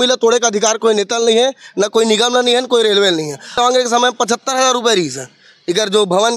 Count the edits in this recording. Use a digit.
1